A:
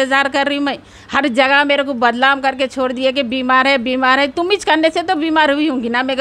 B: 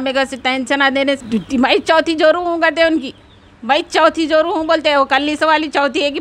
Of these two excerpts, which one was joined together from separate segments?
B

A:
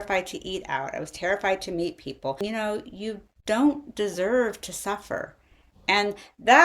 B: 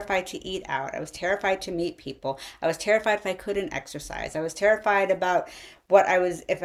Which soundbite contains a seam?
A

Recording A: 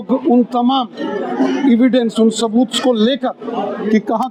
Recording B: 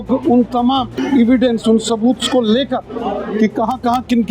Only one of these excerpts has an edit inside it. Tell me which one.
B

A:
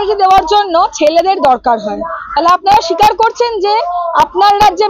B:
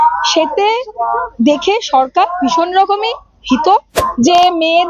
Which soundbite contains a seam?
B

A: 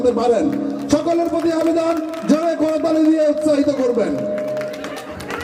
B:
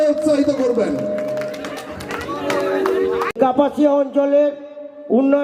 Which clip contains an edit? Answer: B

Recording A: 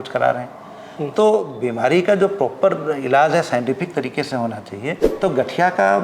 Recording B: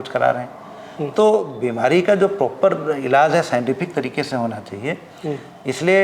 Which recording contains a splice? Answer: A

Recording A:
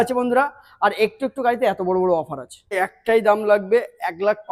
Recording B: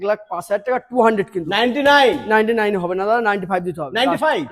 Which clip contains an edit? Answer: A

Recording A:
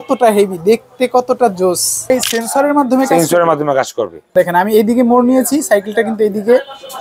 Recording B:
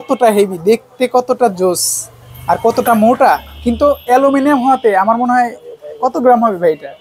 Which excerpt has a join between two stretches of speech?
A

